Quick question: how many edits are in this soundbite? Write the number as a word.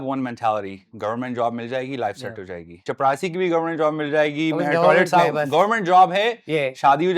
one